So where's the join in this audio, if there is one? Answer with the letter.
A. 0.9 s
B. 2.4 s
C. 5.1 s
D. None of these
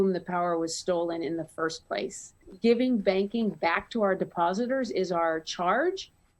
B